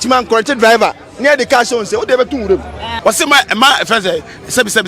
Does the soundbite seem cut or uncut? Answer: cut